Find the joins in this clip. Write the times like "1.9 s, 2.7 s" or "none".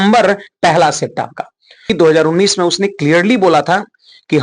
1.8 s